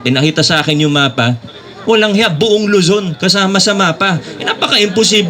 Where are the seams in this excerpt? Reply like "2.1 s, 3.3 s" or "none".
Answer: none